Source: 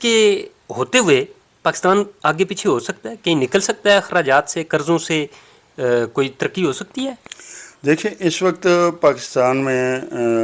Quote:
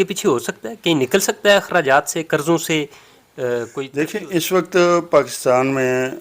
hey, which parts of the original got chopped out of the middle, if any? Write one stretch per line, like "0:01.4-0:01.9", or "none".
0:06.3-0:07.8